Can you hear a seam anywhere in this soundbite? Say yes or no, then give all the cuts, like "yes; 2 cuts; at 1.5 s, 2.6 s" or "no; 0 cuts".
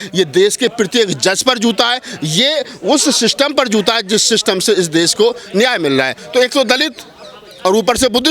yes; 1 cut; at 6.2 s